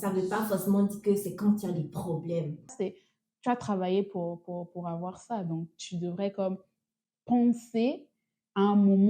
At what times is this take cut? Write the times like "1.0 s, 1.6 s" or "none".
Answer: 2.7 s